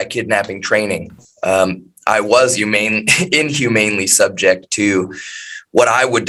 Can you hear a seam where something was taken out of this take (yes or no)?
no